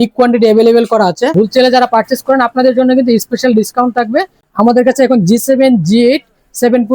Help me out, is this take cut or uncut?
cut